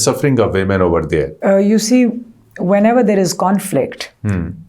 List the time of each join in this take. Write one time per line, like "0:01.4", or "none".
none